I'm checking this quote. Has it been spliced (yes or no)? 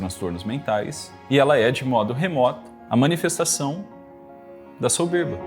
yes